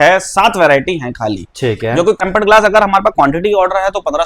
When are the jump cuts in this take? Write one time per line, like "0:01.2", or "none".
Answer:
0:02.2